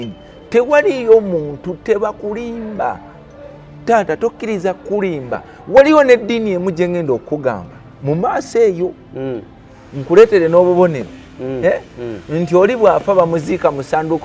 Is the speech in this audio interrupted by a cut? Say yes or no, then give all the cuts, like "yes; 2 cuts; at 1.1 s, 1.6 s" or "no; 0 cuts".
no; 0 cuts